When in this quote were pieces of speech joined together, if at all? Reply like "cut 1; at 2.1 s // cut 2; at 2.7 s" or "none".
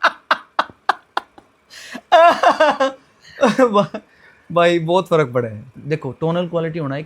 cut 1; at 5.7 s

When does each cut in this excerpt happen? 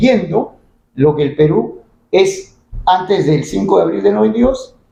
none

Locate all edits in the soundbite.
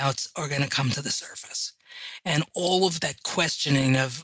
cut 1; at 3.0 s

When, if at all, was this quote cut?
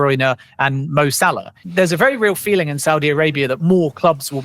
cut 1; at 1.5 s

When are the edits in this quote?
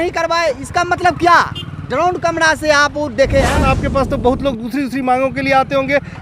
cut 1; at 3.5 s

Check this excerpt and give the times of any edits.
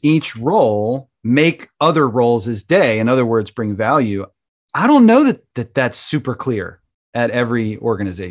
none

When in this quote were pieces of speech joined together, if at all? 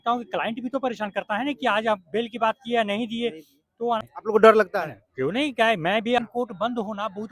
cut 1; at 4.1 s // cut 2; at 6.2 s

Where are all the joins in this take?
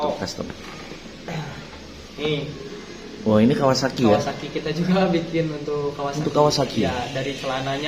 none

